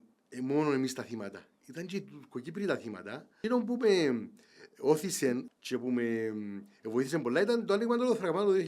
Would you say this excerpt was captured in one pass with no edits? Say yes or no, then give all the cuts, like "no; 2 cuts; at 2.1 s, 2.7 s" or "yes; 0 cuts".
no; 2 cuts; at 3.4 s, 5.5 s